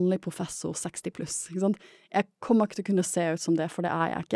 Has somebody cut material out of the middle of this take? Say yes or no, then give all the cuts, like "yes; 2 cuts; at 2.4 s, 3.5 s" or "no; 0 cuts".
no; 0 cuts